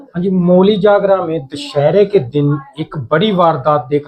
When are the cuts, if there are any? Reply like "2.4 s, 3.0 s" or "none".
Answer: none